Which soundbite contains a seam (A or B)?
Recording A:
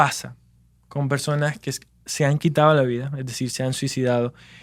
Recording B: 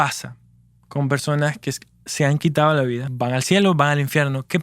B